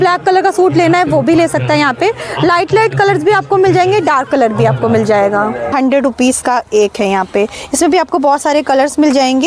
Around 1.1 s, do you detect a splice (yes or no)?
no